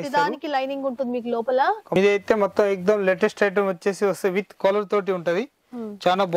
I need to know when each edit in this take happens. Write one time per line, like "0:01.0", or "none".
0:02.0